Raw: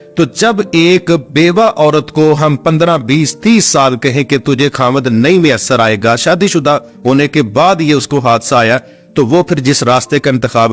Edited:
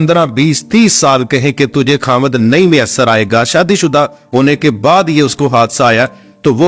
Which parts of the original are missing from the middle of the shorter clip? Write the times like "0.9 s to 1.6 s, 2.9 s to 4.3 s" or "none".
none